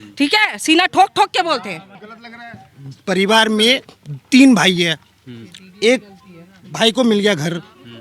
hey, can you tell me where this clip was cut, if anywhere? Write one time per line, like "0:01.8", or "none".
0:02.1